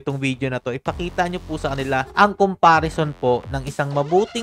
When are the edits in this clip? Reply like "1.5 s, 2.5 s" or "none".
none